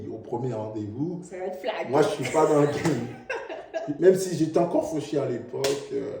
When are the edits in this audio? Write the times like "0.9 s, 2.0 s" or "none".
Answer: 4.0 s